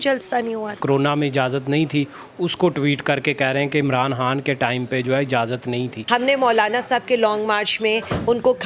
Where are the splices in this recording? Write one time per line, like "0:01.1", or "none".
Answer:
0:00.8
0:06.0